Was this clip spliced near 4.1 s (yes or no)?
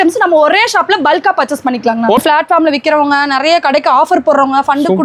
no